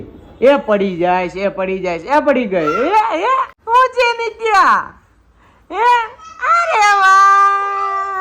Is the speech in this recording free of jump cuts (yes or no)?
yes